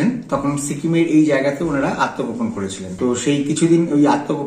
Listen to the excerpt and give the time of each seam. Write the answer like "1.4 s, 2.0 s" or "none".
2.9 s